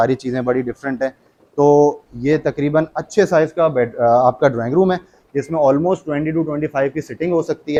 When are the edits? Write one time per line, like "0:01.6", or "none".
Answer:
none